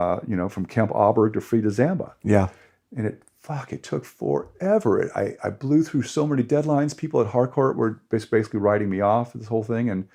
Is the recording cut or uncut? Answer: uncut